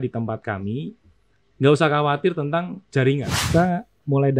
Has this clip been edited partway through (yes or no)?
yes